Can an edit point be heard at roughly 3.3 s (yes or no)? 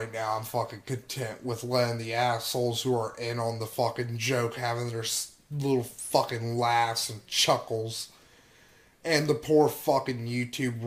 no